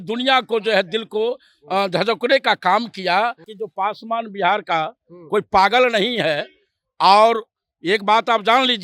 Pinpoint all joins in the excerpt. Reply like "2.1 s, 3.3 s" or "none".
3.5 s